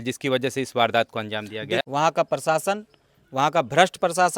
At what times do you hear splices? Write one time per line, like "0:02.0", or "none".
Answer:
0:01.8